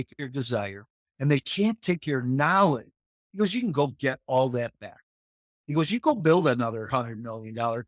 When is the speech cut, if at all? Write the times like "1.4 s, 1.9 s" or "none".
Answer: none

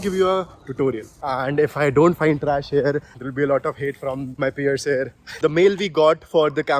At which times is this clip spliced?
1.1 s, 4.3 s, 5.2 s

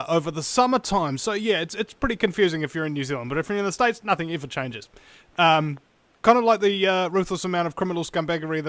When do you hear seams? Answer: 4.7 s

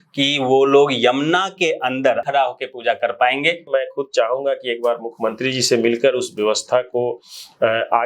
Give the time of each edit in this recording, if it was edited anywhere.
2.2 s, 3.6 s

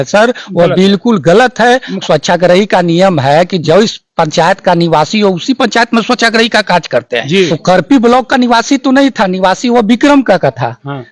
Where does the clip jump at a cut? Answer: 1.9 s, 7.5 s

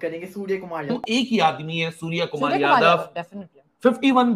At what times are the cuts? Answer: 0.9 s

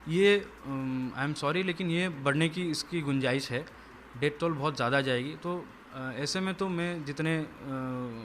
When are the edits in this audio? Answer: none

